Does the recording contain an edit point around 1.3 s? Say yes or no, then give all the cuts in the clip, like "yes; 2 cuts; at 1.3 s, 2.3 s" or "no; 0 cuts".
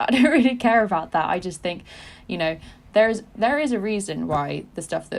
no; 0 cuts